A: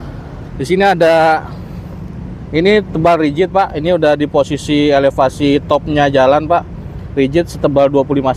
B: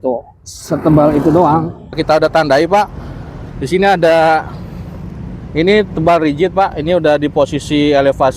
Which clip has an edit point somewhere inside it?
B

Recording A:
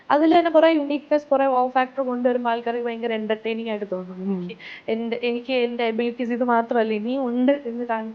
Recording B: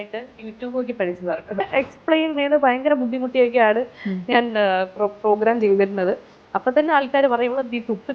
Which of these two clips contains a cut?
B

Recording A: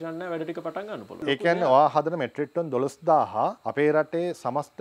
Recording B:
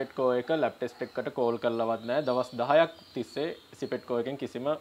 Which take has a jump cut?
A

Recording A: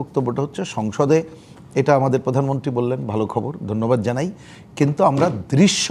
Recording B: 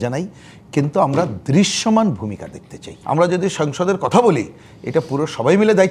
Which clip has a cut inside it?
B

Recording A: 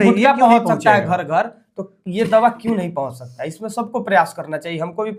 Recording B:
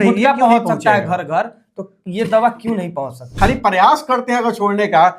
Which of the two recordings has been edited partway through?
B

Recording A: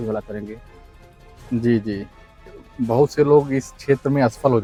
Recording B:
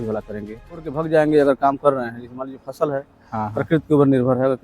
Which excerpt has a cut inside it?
B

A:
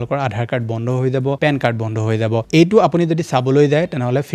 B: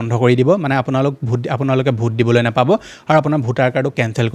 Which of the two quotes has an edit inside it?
A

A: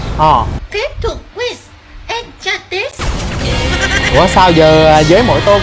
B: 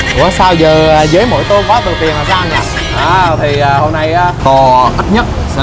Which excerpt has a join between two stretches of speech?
B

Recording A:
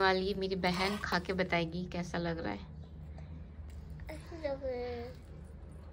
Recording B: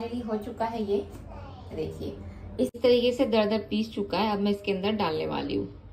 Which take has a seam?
B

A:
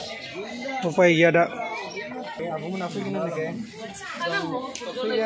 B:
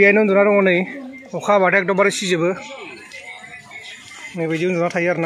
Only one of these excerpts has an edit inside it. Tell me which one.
A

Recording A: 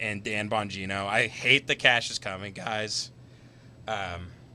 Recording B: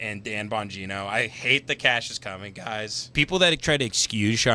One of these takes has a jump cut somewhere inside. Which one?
B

